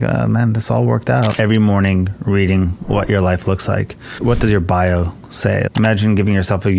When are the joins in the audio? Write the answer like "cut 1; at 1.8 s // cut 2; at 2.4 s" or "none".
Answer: cut 1; at 1.3 s